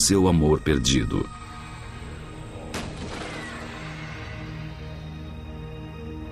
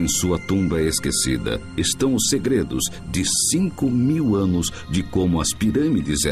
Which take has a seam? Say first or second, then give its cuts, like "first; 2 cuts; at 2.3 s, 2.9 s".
second; 1 cut; at 3.4 s